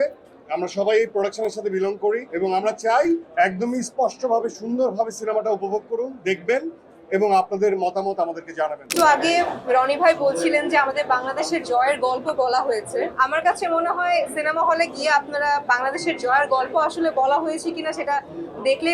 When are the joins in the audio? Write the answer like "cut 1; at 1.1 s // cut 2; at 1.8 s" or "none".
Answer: cut 1; at 2.3 s // cut 2; at 3.3 s // cut 3; at 8.9 s // cut 4; at 13.1 s